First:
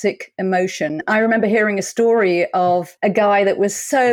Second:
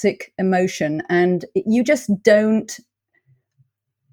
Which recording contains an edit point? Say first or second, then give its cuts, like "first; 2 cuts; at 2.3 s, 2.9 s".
first; 2 cuts; at 1.0 s, 2.9 s